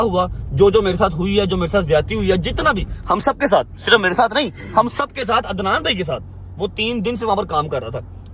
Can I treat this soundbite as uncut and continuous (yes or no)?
yes